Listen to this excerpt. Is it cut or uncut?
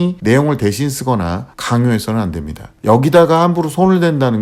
cut